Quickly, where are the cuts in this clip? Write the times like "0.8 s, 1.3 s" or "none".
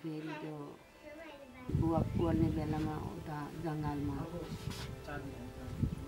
1.7 s